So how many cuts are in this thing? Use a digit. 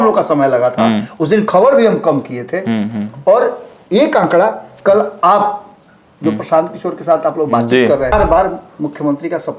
1